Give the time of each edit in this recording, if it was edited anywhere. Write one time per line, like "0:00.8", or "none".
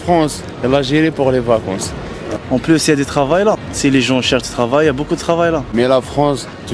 0:02.2
0:03.7
0:05.7